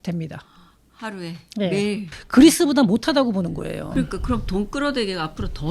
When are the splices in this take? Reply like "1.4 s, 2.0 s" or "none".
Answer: 2.1 s